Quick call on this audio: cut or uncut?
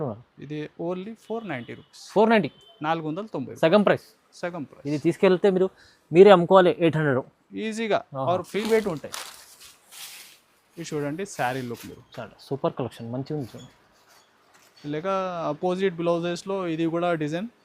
cut